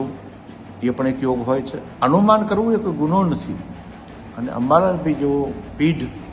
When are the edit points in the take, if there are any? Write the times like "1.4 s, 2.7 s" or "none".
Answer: 1.8 s